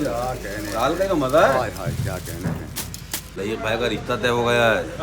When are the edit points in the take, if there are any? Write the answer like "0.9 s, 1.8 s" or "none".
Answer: 3.3 s